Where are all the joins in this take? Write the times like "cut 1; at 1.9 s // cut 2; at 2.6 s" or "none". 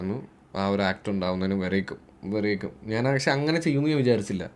none